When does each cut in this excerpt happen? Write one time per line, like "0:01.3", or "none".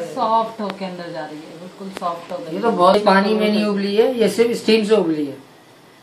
0:02.9